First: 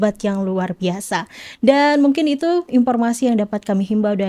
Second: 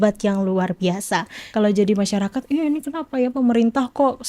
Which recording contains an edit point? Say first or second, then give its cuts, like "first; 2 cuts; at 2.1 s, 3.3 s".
second; 1 cut; at 1.4 s